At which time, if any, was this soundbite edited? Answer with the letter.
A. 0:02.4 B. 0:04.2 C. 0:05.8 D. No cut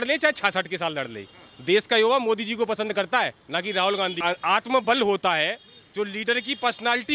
B